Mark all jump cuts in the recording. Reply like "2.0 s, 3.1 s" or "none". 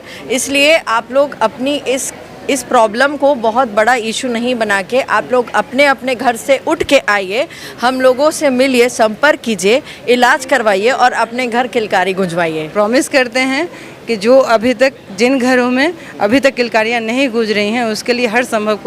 12.6 s